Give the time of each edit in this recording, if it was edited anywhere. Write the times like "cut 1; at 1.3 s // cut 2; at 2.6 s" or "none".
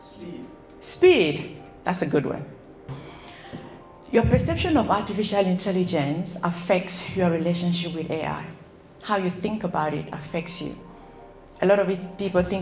cut 1; at 2.9 s